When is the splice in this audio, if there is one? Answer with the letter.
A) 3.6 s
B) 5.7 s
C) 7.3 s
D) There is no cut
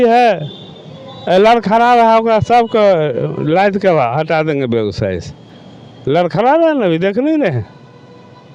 D